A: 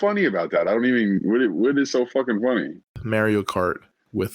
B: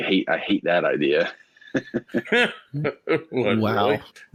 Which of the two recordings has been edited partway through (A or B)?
A